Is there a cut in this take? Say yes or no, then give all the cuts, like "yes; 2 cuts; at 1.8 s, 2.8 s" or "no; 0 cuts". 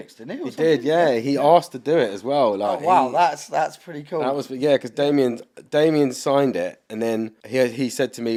no; 0 cuts